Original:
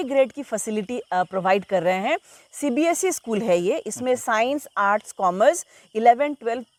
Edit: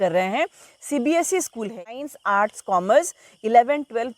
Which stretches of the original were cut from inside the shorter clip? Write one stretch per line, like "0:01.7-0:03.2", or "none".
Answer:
0:03.4-0:04.2